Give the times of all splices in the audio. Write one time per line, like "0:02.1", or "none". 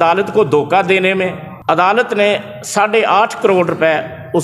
0:01.5